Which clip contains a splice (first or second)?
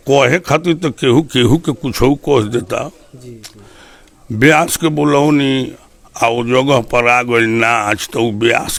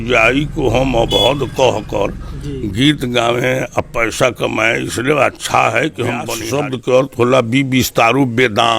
second